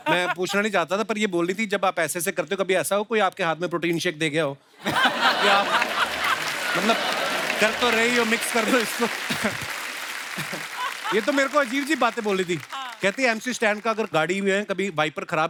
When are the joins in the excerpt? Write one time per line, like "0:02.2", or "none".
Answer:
none